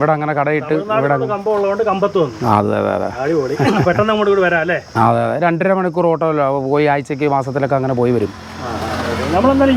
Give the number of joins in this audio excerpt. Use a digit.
0